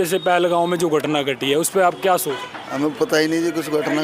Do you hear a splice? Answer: no; 0 cuts

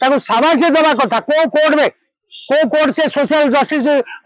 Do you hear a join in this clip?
no; 0 cuts

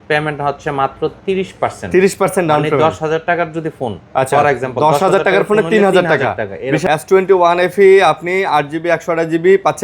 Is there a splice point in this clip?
yes; 1 cut; at 6.8 s

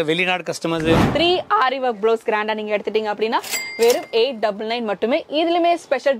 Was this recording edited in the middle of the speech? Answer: yes; 1 cut; at 1.1 s

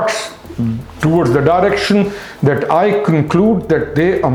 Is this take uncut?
yes; 0 cuts

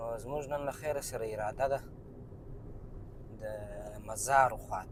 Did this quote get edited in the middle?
no; 0 cuts

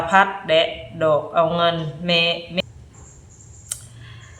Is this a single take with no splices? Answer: no; 1 cut; at 2.6 s

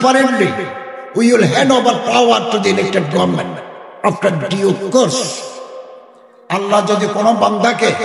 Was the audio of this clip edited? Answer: yes; 1 cut; at 6.6 s

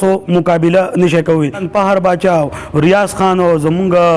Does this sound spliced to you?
yes; 1 cut; at 1.6 s

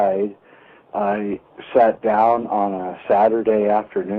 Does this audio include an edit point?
no; 0 cuts

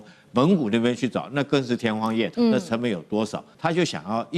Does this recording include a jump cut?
yes; 2 cuts; at 2.3 s, 3.5 s

